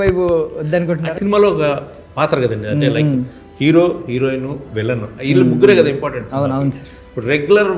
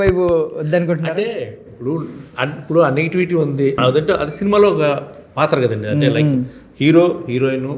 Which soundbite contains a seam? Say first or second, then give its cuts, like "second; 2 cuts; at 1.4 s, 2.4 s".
first; 1 cut; at 1.1 s